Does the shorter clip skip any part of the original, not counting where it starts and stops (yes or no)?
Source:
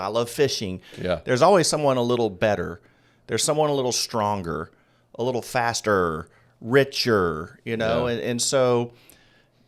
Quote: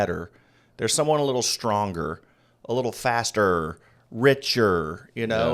no